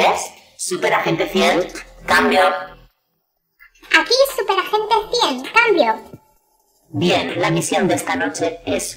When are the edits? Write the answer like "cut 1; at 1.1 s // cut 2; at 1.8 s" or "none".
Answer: none